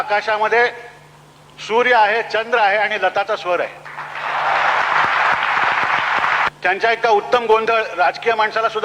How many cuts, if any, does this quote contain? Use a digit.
2